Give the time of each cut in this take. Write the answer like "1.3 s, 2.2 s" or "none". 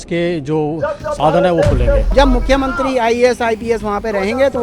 2.1 s